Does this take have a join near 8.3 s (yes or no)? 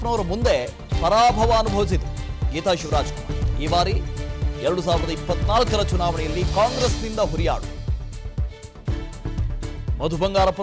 yes